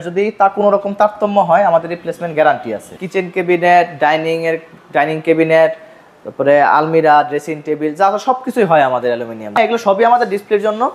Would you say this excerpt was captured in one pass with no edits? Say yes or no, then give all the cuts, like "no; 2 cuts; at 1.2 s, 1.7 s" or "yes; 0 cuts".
no; 2 cuts; at 2.9 s, 9.6 s